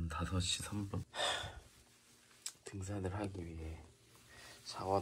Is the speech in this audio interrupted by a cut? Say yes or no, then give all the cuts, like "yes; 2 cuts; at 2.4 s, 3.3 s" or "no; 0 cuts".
yes; 1 cut; at 1.1 s